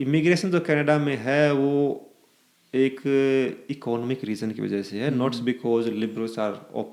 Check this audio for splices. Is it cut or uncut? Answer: uncut